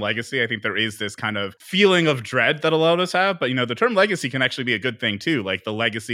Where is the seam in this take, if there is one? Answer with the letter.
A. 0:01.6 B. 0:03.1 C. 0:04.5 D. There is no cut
A